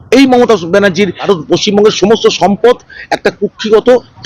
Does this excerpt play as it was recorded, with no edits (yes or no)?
no